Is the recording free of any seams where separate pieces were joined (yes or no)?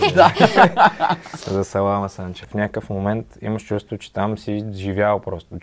no